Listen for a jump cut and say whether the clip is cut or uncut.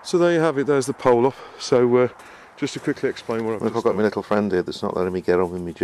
cut